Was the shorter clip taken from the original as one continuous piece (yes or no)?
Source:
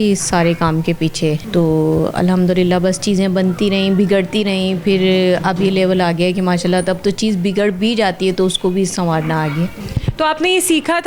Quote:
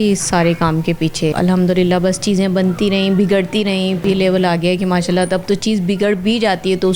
no